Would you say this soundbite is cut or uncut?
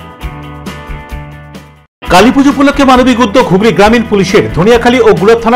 cut